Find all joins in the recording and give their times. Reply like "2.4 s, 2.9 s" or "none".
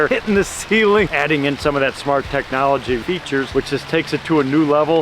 1.1 s, 3.0 s